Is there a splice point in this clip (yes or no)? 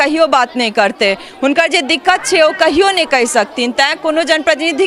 no